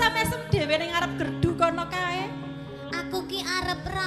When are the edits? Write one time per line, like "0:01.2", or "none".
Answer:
none